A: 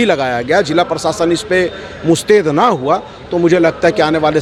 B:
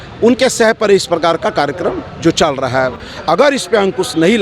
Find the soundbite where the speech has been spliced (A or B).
B